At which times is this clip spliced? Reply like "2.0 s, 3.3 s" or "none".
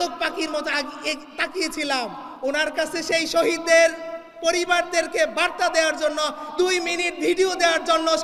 none